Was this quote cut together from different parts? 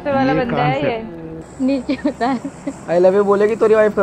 yes; 1 cut; at 1.4 s

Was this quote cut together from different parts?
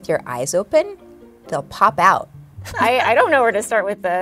yes; 1 cut; at 2.6 s

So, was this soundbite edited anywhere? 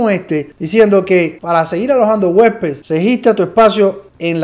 no; 0 cuts

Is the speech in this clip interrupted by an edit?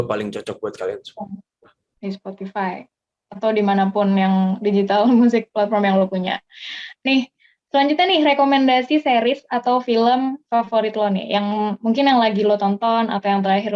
no; 0 cuts

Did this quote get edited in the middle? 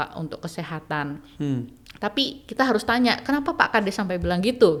no; 0 cuts

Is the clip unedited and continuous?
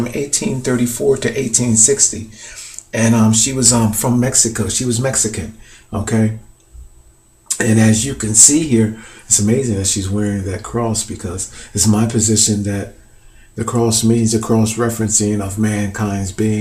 no; 1 cut; at 9.0 s

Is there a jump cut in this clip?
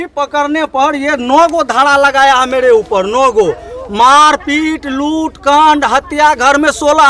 no; 0 cuts

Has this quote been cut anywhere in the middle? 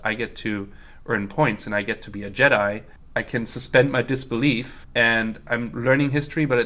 yes; 2 cuts; at 2.9 s, 4.8 s

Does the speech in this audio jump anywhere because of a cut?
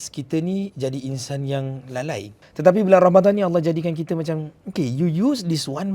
yes; 1 cut; at 2.4 s

